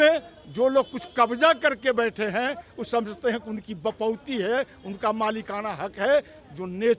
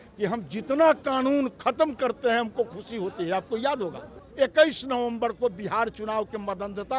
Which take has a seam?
second; 1 cut; at 4.2 s

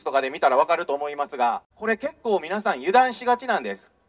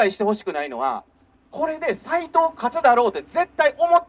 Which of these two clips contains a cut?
first; 1 cut; at 1.9 s

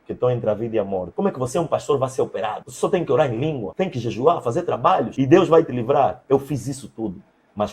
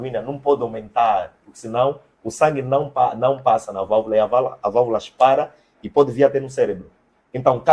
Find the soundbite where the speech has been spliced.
first; 4 cuts; at 1.0 s, 2.6 s, 3.7 s, 5.1 s

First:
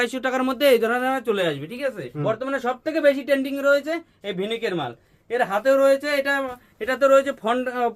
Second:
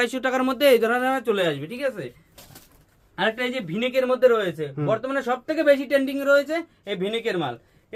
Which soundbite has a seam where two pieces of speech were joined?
first; 1 cut; at 2.1 s

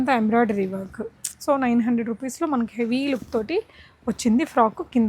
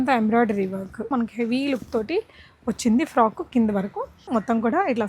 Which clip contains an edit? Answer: second; 2 cuts; at 1.1 s, 4.3 s

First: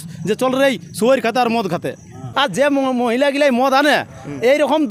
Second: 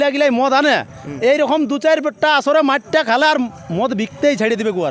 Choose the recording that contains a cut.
first; 1 cut; at 2.2 s

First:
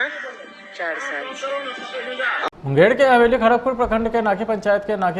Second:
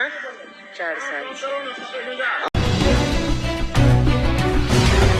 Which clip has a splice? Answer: first; 1 cut; at 2.7 s

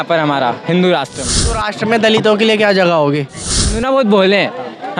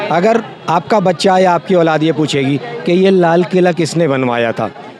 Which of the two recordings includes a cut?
first; 2 cuts; at 1.6 s, 3.8 s

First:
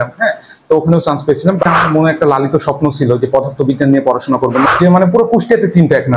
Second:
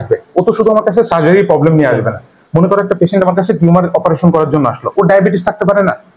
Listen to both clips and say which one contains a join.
first; 2 cuts; at 1.7 s, 4.7 s

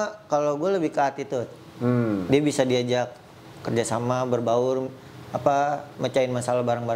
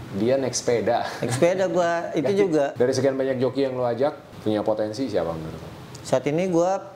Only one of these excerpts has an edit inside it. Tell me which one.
second; 2 cuts; at 2.7 s, 4.3 s

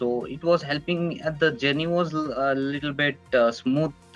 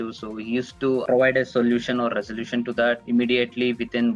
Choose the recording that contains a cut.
second; 2 cuts; at 1.0 s, 3.0 s

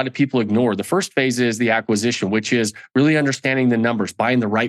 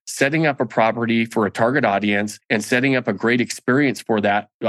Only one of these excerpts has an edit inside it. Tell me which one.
second; 1 cut; at 2.4 s

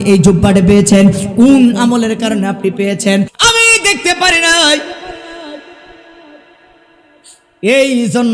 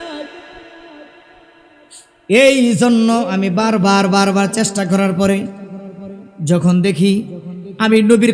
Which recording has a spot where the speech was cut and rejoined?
first; 1 cut; at 3.3 s

